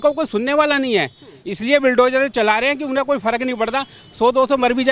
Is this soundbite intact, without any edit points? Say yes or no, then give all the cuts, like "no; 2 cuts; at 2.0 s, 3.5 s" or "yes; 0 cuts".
yes; 0 cuts